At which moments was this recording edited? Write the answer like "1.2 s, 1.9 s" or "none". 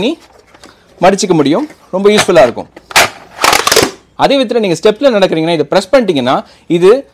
4.0 s